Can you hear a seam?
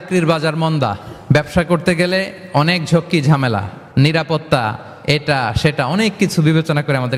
no; 0 cuts

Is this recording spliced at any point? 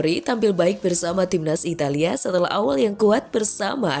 no; 0 cuts

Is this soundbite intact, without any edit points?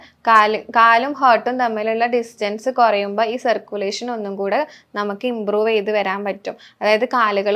yes; 0 cuts

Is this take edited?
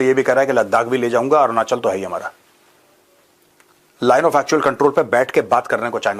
no; 0 cuts

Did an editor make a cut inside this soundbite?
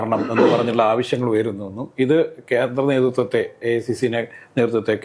no; 0 cuts

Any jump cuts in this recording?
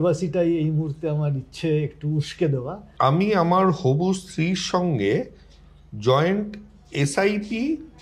yes; 1 cut; at 2.8 s

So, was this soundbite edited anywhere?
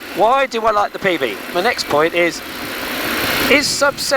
yes; 1 cut; at 1.4 s

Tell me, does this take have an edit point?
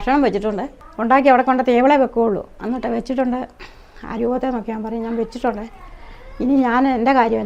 no; 0 cuts

